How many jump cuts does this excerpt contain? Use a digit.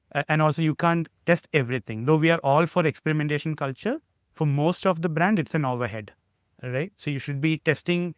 0